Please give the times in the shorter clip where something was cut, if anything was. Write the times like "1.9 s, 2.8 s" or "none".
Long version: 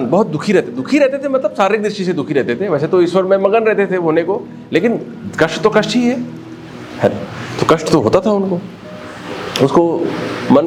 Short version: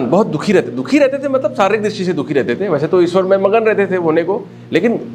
none